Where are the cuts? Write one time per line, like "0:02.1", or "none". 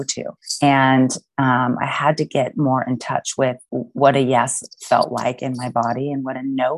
0:03.7